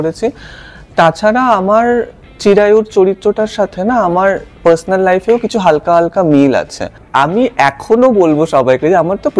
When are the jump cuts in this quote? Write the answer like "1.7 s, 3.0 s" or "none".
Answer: 7.0 s